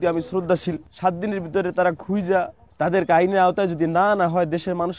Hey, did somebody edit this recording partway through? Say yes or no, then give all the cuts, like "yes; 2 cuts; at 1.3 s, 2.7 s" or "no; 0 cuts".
yes; 2 cuts; at 0.9 s, 2.6 s